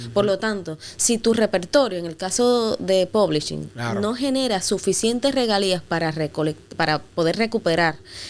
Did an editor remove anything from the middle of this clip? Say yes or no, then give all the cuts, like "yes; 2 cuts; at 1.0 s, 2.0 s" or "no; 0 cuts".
no; 0 cuts